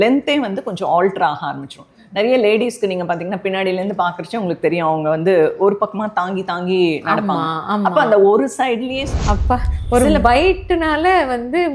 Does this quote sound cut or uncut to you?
cut